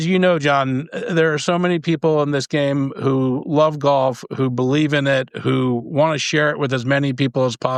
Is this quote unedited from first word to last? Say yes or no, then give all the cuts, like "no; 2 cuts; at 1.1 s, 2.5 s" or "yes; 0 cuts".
yes; 0 cuts